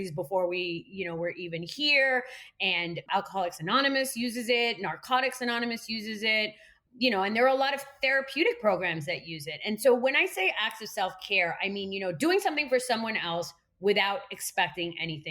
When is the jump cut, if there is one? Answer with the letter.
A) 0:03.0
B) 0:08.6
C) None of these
A